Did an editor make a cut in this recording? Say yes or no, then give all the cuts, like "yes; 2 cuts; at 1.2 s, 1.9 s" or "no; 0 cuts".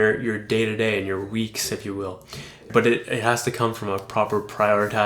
yes; 1 cut; at 2.7 s